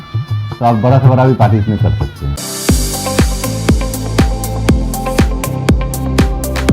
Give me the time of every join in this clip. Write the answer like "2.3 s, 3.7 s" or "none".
2.3 s